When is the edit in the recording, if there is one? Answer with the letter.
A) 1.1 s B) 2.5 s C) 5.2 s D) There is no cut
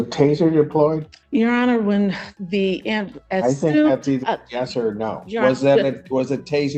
A